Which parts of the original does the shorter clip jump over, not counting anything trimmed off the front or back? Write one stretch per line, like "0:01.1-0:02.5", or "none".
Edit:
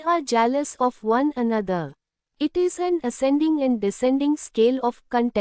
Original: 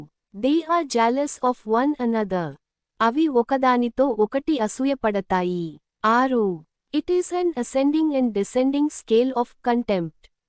0:02.8-0:06.7